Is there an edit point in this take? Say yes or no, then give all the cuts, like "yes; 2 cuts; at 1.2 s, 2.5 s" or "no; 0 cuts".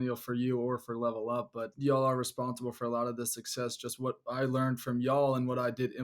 yes; 1 cut; at 1.7 s